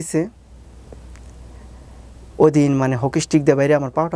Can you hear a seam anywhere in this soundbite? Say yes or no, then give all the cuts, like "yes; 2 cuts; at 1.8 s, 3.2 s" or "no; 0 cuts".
no; 0 cuts